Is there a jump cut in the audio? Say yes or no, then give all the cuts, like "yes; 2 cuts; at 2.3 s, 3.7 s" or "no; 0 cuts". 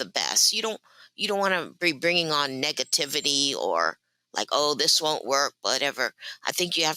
no; 0 cuts